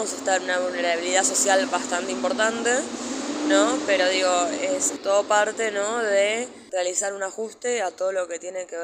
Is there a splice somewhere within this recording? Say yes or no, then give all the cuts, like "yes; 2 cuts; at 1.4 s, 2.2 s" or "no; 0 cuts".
yes; 2 cuts; at 4.9 s, 6.6 s